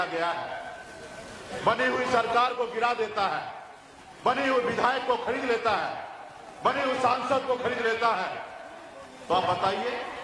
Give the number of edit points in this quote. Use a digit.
0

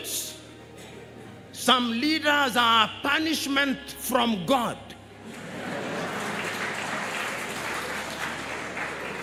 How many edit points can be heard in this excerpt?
0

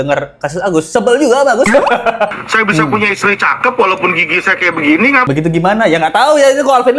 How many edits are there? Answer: 2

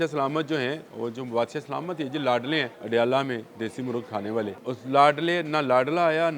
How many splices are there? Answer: 2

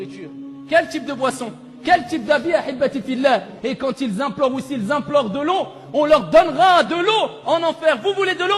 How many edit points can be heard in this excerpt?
1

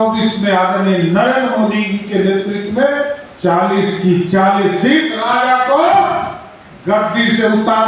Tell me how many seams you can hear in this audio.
1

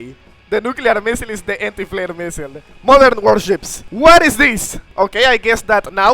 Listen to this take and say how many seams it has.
1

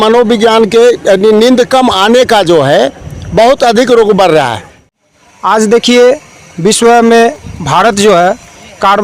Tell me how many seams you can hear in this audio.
1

